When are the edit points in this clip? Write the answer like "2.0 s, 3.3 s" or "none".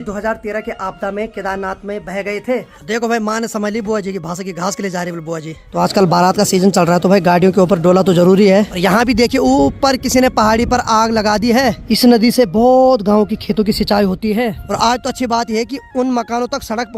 2.7 s, 5.6 s, 8.7 s, 11.8 s, 14.6 s